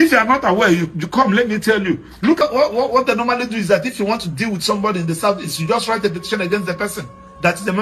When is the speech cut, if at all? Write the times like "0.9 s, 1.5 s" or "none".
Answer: 2.4 s